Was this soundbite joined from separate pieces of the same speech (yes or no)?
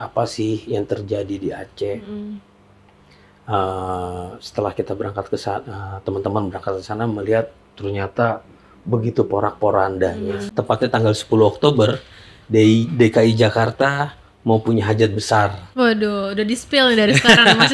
yes